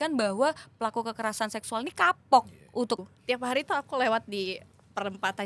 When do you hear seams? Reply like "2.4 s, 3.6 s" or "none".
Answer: 3.0 s